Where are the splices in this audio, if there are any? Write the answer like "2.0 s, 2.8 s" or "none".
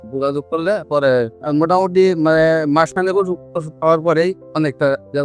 1.4 s